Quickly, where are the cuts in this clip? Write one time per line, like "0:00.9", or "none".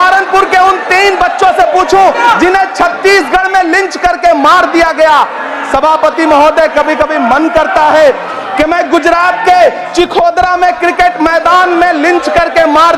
none